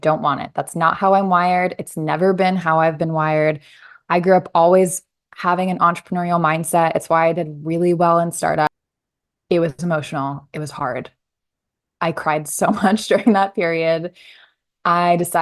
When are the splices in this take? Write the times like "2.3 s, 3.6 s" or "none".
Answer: 8.7 s